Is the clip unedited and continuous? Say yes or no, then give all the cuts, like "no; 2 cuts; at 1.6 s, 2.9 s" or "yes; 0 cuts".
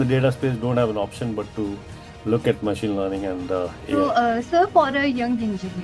no; 1 cut; at 3.8 s